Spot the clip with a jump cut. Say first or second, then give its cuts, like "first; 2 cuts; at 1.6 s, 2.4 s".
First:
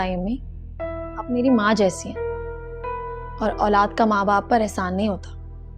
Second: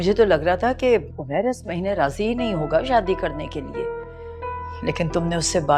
first; 2 cuts; at 1.9 s, 3.3 s